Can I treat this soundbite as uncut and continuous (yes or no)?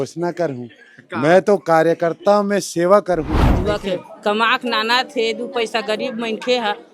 no